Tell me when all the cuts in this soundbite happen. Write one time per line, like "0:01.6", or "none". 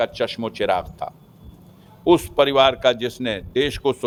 none